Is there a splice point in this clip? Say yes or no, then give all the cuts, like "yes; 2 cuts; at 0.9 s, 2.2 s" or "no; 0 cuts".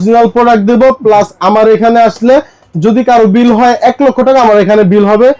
no; 0 cuts